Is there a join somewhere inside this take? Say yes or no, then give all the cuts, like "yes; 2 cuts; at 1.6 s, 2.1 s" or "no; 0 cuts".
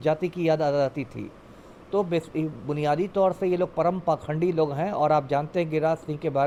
no; 0 cuts